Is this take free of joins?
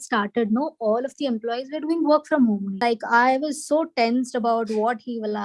no; 1 cut; at 2.8 s

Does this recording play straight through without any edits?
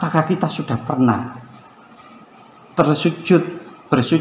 yes; 0 cuts

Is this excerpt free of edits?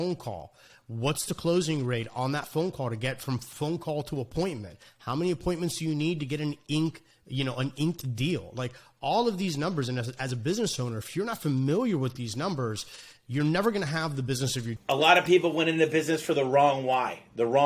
no; 1 cut; at 14.7 s

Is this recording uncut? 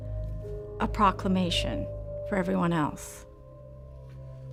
yes; 0 cuts

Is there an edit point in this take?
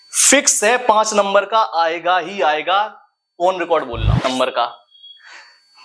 yes; 1 cut; at 4.2 s

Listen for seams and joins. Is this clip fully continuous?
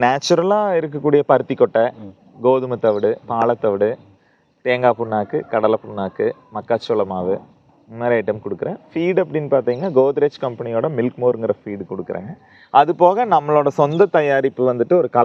yes; 0 cuts

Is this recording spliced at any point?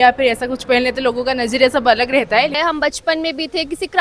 yes; 1 cut; at 2.6 s

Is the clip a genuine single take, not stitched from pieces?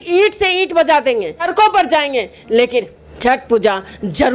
no; 1 cut; at 1.5 s

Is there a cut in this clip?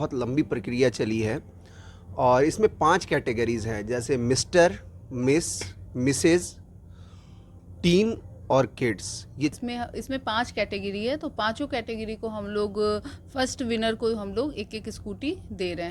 yes; 1 cut; at 9.6 s

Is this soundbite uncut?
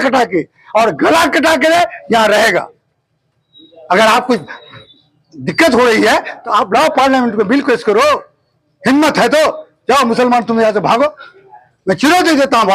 yes; 0 cuts

